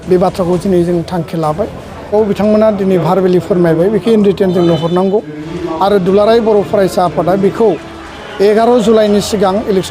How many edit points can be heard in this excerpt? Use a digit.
1